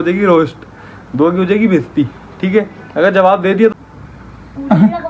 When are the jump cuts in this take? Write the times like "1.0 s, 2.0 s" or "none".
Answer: 2.4 s, 3.7 s